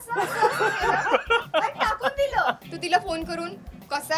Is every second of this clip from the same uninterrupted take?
no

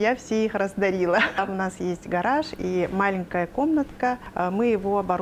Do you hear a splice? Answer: yes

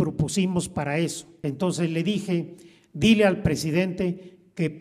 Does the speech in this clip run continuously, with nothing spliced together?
no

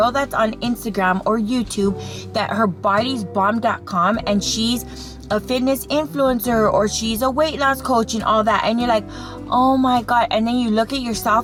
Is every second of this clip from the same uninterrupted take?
yes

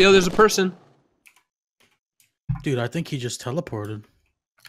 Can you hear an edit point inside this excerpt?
no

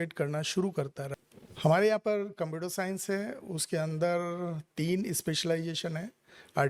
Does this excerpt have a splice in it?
yes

